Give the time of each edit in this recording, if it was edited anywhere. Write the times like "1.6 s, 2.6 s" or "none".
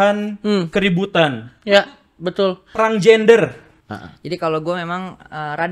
3.7 s